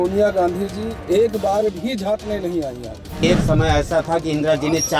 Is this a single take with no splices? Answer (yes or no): no